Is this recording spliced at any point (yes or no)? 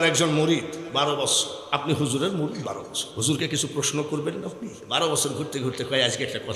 yes